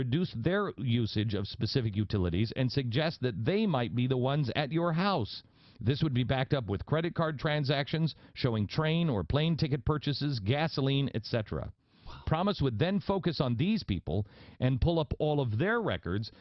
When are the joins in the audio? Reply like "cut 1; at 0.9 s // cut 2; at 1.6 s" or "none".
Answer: cut 1; at 2.1 s

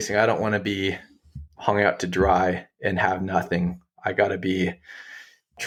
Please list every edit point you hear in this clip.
none

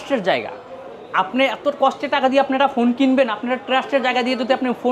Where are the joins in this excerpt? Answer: none

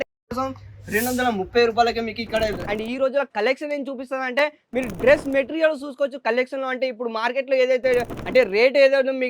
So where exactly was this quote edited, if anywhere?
cut 1; at 2.6 s

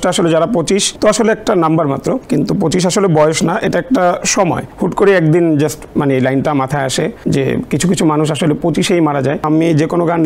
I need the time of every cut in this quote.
cut 1; at 0.9 s // cut 2; at 2.2 s // cut 3; at 4.7 s // cut 4; at 7.2 s // cut 5; at 9.4 s

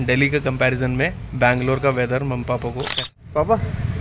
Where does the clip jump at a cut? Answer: cut 1; at 3.0 s

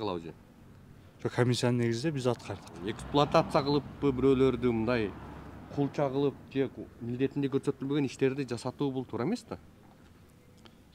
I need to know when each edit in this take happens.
cut 1; at 2.7 s

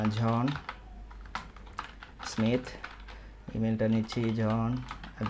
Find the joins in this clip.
none

